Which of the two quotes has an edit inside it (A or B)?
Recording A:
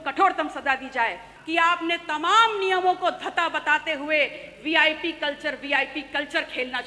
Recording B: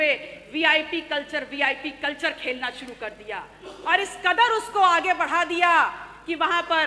A